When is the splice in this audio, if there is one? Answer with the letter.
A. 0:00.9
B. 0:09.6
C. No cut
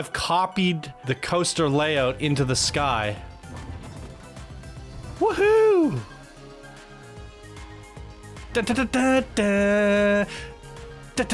A